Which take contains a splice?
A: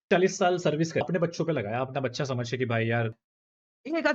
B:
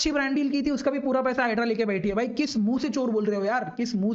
A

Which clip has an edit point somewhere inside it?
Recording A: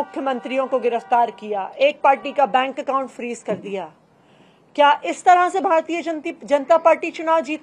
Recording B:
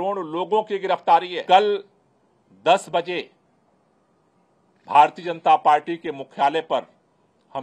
B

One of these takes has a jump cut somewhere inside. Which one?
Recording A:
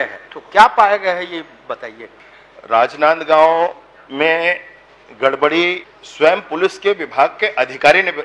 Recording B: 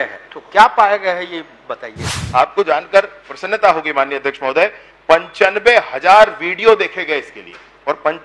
B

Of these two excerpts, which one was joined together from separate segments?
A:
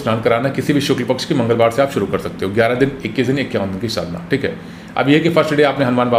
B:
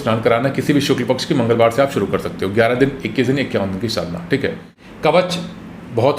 B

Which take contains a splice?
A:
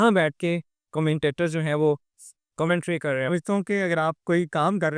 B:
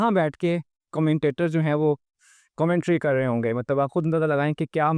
A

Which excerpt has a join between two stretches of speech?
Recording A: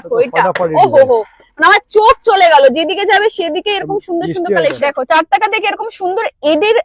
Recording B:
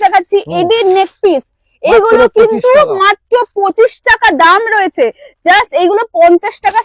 A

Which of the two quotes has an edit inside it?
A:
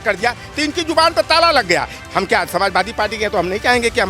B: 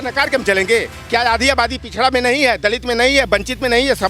A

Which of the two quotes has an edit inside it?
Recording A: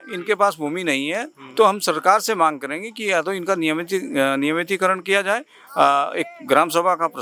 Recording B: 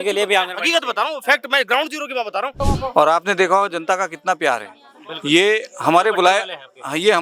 B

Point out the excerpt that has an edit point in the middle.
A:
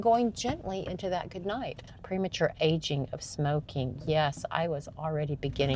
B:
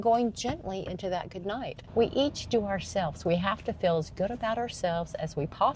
B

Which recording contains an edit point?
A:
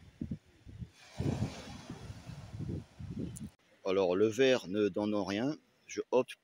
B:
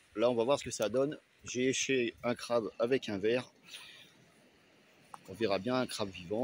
A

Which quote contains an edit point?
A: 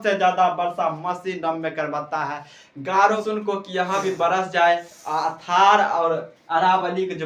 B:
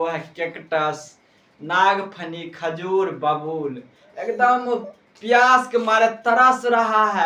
A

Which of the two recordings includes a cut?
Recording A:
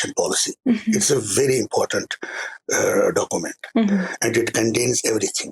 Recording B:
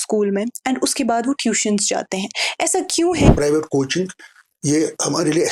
B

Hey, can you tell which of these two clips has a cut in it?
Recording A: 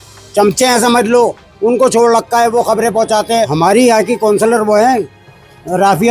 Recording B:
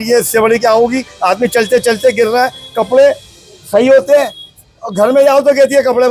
A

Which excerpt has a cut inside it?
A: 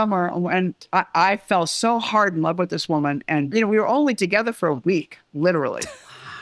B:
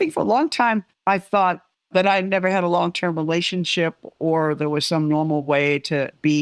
B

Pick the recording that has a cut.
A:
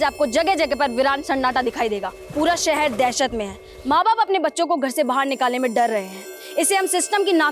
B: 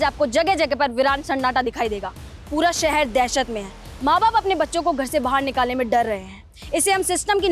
A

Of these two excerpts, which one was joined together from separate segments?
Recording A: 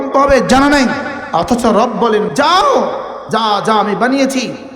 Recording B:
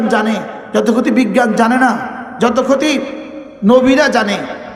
A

